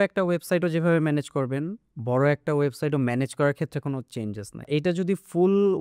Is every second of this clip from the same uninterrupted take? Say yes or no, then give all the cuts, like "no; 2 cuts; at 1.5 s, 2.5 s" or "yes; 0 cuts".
no; 1 cut; at 4.6 s